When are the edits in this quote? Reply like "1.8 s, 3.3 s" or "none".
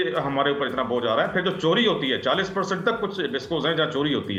none